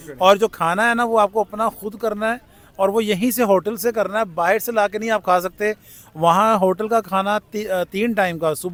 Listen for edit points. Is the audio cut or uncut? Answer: uncut